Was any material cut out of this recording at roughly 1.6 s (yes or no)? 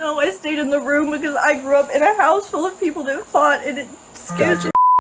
no